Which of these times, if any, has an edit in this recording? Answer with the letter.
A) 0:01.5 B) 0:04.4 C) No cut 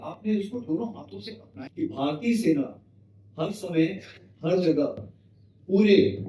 A